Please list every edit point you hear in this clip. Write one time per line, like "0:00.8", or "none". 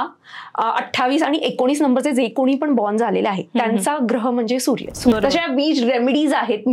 0:05.1